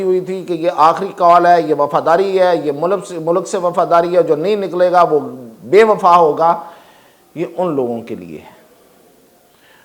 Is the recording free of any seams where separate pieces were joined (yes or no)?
yes